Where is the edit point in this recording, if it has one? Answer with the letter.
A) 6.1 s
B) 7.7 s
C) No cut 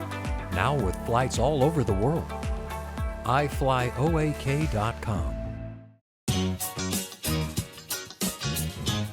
A